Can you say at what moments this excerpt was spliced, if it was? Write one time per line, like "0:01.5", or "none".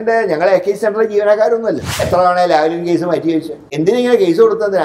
0:02.0
0:03.7